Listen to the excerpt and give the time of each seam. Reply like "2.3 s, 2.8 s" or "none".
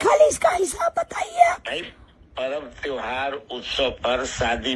none